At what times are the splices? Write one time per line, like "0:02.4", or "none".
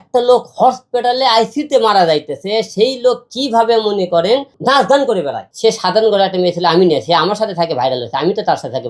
0:04.5
0:05.4